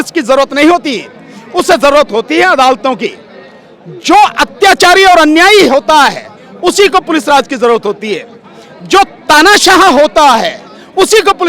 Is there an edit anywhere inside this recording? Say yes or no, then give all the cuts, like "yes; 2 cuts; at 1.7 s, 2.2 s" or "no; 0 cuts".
no; 0 cuts